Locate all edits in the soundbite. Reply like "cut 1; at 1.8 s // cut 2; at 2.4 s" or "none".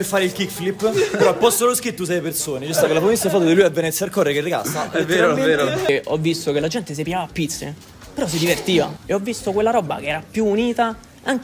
cut 1; at 5.9 s // cut 2; at 9.0 s